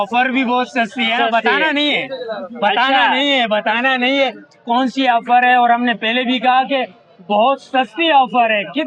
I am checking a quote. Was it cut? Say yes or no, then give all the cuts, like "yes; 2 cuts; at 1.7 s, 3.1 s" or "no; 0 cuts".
no; 0 cuts